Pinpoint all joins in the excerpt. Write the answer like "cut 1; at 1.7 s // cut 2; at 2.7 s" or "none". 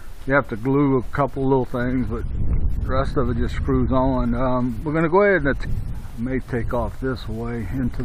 none